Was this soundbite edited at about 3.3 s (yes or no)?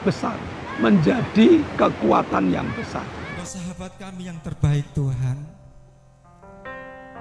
yes